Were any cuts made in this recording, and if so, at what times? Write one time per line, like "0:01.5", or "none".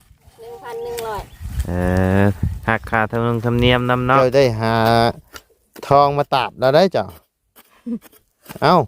0:04.2

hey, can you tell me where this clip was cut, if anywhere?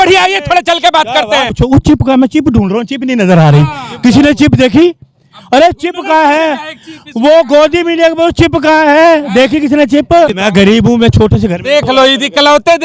0:01.5
0:10.4

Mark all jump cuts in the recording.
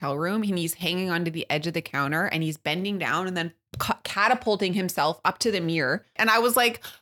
0:06.1

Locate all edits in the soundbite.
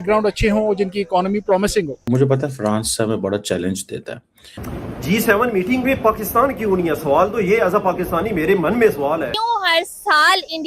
0:02.0
0:04.6
0:09.3

